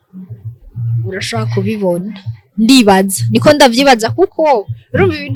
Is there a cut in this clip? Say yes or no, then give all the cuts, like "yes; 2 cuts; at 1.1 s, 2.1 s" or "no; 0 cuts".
no; 0 cuts